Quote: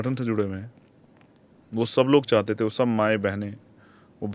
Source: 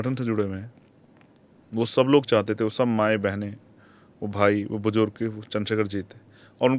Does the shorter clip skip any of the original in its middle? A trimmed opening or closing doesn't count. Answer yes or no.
no